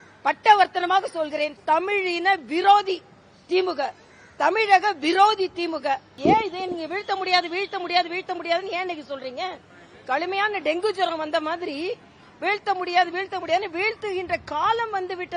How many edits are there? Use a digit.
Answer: 1